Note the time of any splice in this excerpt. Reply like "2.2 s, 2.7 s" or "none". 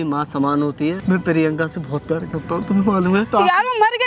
1.0 s